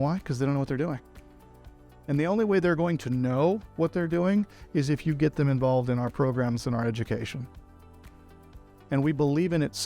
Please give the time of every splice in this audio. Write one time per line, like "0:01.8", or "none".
none